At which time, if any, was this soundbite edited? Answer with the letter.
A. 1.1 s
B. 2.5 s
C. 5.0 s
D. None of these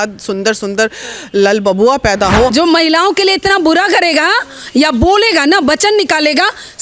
B